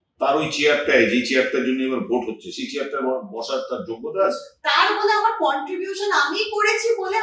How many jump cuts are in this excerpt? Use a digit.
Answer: 1